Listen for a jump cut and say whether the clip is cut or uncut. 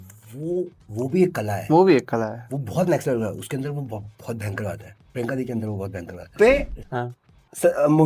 cut